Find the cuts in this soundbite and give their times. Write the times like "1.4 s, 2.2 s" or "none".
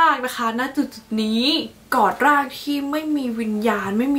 1.8 s